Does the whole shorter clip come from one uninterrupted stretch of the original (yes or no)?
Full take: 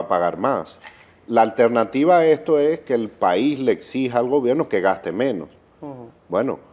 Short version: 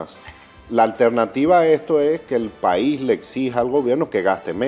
yes